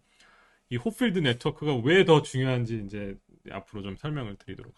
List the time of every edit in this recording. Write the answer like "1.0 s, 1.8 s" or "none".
none